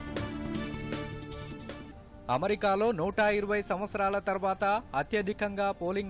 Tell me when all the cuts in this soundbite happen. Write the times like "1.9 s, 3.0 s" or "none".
1.9 s